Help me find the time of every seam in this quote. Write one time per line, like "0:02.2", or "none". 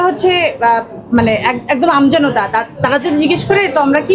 none